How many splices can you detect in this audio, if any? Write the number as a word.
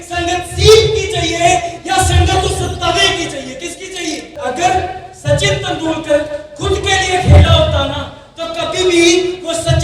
one